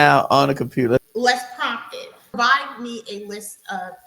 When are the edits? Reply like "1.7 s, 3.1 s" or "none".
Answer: 1.0 s, 2.3 s